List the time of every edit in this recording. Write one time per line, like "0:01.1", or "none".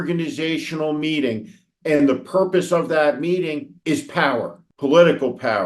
0:03.7
0:04.6